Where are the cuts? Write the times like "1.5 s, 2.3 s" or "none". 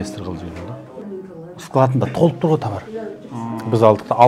0.9 s